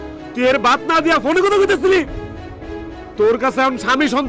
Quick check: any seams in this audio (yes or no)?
no